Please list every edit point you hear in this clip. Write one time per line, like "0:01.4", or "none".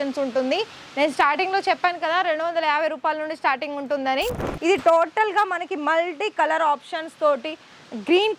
0:04.5